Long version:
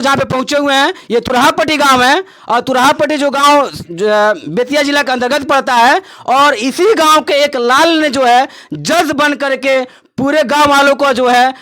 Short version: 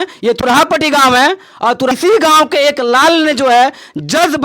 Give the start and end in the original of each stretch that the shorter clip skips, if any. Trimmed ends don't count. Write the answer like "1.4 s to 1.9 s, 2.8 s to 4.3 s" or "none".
2.8 s to 6.7 s